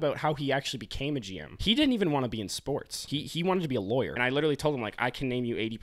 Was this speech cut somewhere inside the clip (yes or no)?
yes